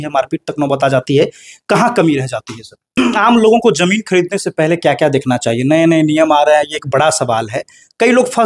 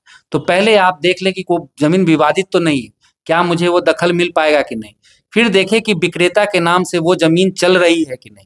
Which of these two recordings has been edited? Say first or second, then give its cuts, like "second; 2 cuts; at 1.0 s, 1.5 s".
first; 1 cut; at 3.0 s